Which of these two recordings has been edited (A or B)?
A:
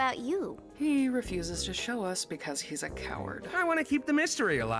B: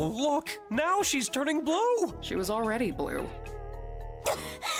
A